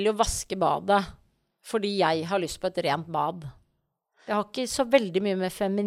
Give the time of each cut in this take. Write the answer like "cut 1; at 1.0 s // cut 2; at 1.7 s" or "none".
cut 1; at 4.1 s